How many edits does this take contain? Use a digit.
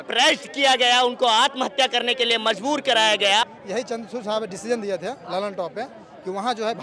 1